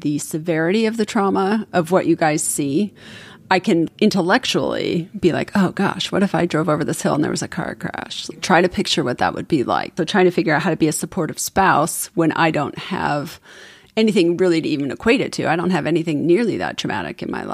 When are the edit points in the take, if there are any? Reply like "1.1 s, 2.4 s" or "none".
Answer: 3.9 s, 8.3 s, 10.0 s